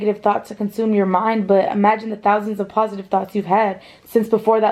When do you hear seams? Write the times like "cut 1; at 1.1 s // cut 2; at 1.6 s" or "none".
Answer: none

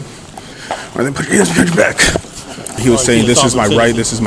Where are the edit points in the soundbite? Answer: cut 1; at 2.8 s

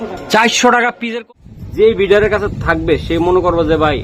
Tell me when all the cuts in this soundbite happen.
cut 1; at 1.0 s

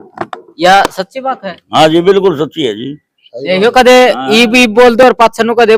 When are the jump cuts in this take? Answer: none

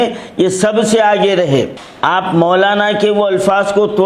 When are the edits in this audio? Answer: cut 1; at 1.8 s

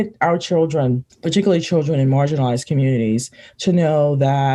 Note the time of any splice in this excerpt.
cut 1; at 1.1 s

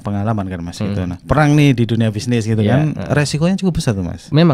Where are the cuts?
cut 1; at 1.2 s

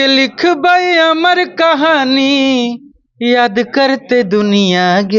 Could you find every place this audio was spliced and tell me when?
none

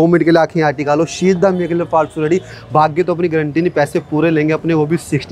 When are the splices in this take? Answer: none

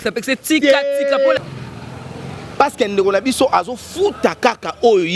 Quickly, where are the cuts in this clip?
cut 1; at 1.4 s

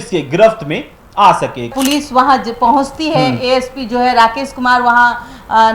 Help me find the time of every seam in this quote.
cut 1; at 1.7 s

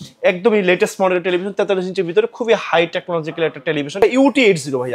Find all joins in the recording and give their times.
cut 1; at 4.0 s

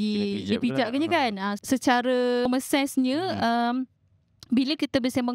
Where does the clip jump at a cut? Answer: cut 1; at 1.6 s // cut 2; at 2.5 s

